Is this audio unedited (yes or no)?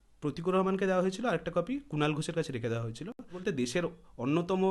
no